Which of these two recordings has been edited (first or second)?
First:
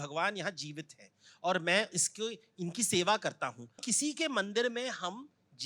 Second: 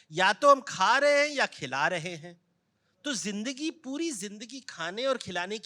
first